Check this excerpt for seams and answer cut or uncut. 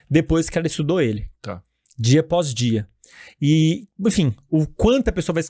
uncut